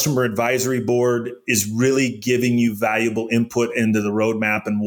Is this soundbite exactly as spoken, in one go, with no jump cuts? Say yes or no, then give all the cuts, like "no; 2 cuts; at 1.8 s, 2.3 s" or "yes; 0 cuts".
yes; 0 cuts